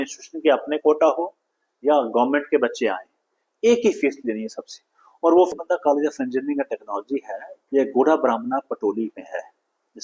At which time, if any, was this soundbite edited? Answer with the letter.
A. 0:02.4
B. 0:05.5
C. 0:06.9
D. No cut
B